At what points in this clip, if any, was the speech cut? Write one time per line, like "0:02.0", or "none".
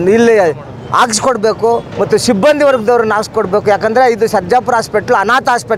none

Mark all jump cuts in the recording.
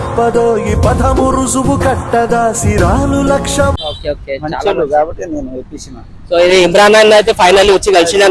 none

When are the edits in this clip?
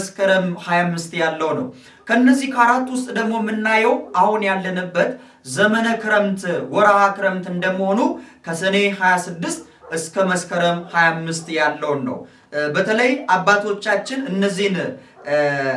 none

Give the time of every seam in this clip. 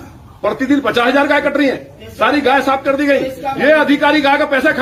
none

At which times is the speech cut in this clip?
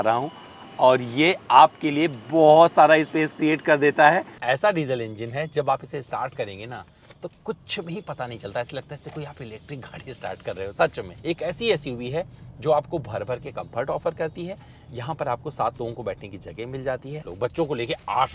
0:04.4
0:11.1
0:17.3

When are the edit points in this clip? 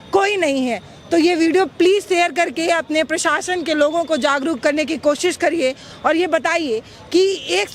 none

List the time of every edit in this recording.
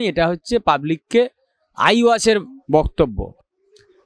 none

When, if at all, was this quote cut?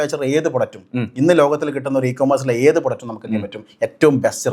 none

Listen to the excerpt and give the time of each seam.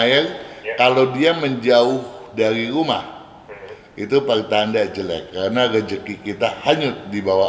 none

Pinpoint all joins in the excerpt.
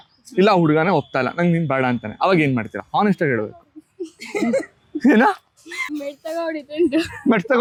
none

